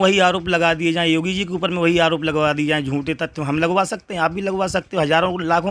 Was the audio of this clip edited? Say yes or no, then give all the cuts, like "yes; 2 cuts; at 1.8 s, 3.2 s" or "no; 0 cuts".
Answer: no; 0 cuts